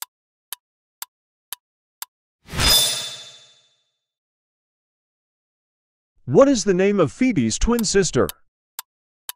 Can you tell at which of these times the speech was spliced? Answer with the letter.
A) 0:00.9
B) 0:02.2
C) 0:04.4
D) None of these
B